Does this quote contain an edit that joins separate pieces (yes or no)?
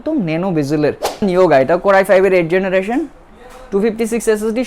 yes